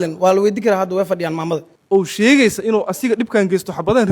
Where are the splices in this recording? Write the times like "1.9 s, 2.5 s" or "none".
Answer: 1.7 s